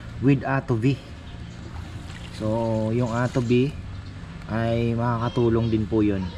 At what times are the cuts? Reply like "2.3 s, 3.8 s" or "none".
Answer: none